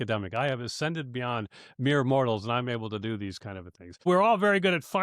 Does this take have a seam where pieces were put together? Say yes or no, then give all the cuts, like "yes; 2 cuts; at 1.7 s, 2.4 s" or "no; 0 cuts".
yes; 1 cut; at 4.0 s